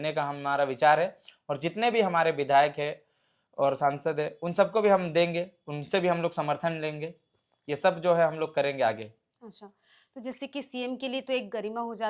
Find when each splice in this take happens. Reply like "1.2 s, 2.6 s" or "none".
none